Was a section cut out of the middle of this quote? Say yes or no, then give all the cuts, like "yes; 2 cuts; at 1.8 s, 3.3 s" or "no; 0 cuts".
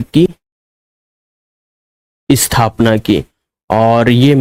no; 0 cuts